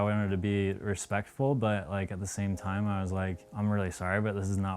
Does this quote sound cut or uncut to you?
cut